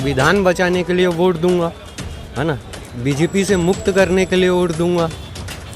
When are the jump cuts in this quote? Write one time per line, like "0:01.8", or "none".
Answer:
none